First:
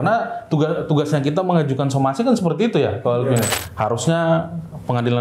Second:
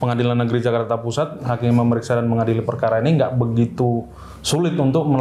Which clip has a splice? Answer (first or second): first